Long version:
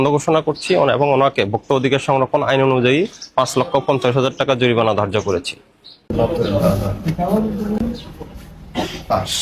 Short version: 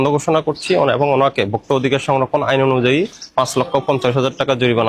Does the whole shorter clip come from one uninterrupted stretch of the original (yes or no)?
yes